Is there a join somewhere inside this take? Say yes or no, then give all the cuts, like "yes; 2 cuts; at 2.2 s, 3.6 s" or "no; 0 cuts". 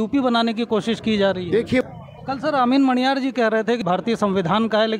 yes; 2 cuts; at 1.8 s, 3.8 s